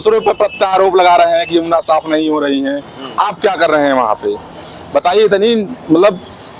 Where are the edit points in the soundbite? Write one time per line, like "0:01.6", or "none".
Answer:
none